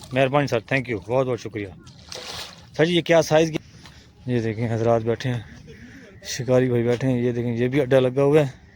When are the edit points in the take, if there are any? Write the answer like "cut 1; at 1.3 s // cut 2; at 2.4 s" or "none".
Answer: none

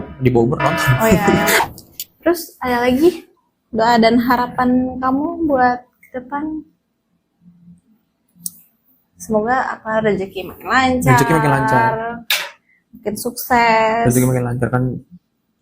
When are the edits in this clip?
cut 1; at 1.6 s

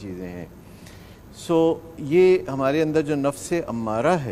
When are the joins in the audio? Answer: none

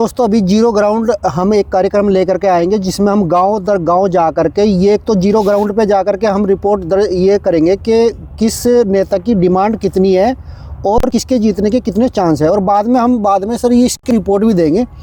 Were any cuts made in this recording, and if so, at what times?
none

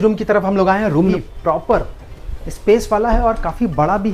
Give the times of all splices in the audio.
cut 1; at 1.1 s

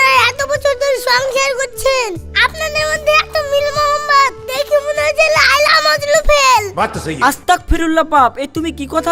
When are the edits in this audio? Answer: none

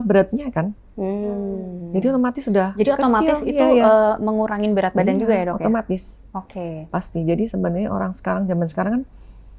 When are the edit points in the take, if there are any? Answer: none

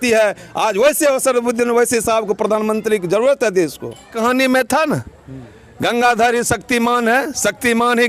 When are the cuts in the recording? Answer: cut 1; at 4.1 s

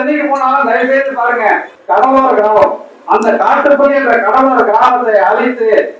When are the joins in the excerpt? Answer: cut 1; at 1.7 s

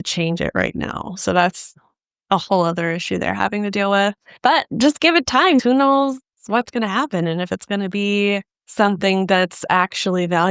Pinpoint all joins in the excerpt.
cut 1; at 5.6 s

